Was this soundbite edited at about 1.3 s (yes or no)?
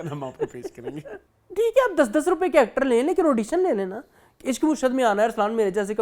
yes